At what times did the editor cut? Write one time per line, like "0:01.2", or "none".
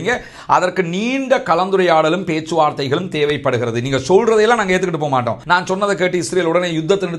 0:05.4